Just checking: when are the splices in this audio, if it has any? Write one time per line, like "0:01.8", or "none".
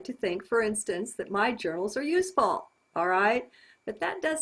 0:02.1